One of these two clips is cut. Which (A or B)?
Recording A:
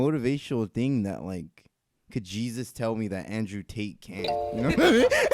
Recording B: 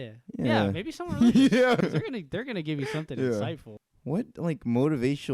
B